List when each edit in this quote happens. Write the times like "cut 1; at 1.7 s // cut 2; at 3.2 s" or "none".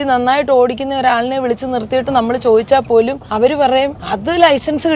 cut 1; at 3.2 s // cut 2; at 4.1 s

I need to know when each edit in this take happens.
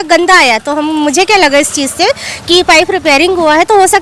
none

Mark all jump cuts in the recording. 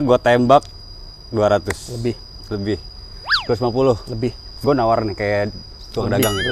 none

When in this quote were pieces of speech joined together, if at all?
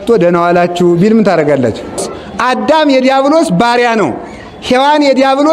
cut 1; at 2.1 s

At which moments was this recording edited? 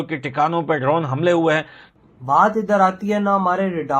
cut 1; at 1.8 s

